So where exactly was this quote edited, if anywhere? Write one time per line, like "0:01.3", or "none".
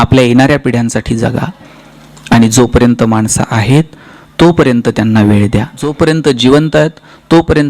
0:05.8